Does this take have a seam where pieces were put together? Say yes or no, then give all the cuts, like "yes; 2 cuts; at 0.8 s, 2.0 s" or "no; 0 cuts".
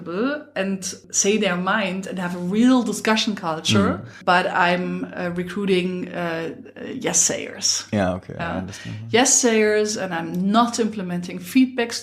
yes; 2 cuts; at 1.0 s, 4.1 s